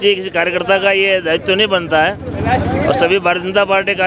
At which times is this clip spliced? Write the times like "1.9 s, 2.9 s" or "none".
none